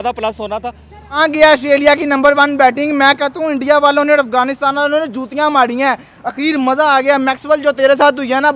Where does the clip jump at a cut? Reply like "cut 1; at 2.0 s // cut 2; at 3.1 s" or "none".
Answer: cut 1; at 1.2 s